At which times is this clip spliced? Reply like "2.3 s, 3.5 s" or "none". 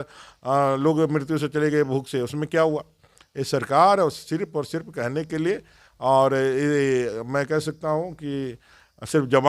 none